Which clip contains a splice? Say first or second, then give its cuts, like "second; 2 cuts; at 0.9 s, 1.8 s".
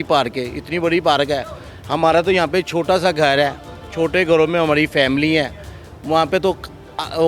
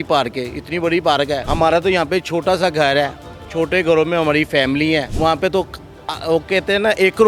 second; 2 cuts; at 1.5 s, 5.1 s